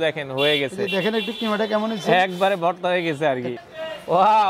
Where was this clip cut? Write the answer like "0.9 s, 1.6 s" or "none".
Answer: 3.6 s